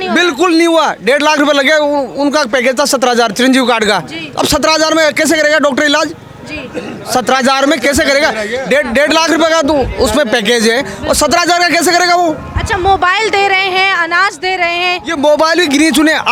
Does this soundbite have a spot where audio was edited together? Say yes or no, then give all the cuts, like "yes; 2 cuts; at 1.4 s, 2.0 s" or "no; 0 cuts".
no; 0 cuts